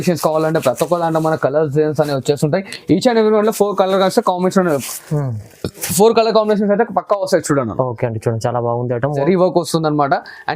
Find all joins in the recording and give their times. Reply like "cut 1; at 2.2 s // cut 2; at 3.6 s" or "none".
cut 1; at 9.2 s

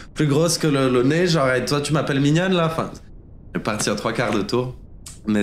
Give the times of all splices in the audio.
none

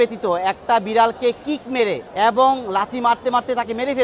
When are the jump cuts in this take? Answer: cut 1; at 2.0 s

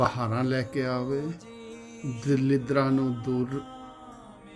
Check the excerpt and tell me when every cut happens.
cut 1; at 3.6 s

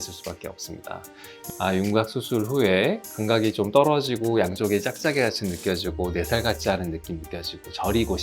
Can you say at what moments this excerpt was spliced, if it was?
cut 1; at 1.4 s

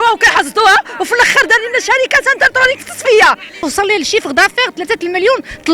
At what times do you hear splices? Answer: cut 1; at 3.6 s

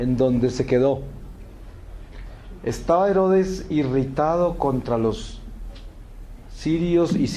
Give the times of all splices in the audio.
cut 1; at 2.6 s

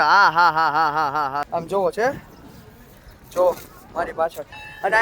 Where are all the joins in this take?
cut 1; at 1.5 s

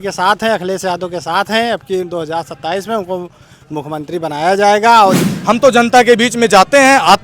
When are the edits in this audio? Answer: cut 1; at 5.3 s

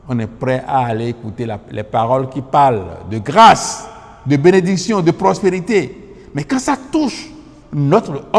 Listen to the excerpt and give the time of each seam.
none

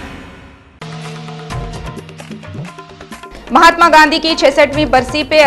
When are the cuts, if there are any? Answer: cut 1; at 2.9 s

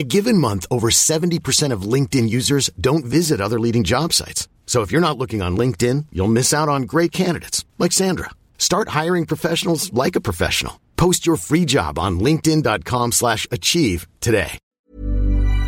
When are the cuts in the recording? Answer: cut 1; at 14.8 s

